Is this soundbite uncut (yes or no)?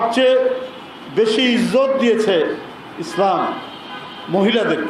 yes